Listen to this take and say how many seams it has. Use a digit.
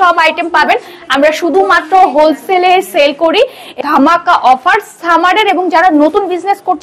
1